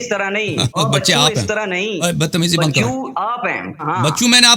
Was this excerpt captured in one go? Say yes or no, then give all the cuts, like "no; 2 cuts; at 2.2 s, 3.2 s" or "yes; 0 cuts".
no; 2 cuts; at 2.0 s, 3.8 s